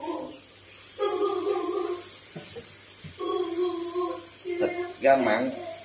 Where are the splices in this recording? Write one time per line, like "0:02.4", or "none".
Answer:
none